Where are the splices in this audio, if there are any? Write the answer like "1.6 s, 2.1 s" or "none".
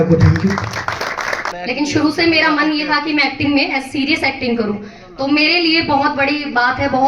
1.4 s